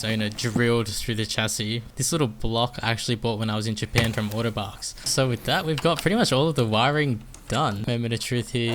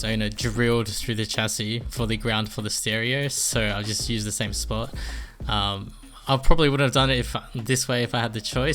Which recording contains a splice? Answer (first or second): first